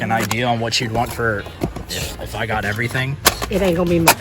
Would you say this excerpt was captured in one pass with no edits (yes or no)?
no